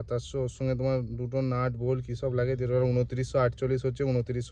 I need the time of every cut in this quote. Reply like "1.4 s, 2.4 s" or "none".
none